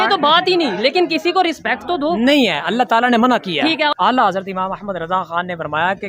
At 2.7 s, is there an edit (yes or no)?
no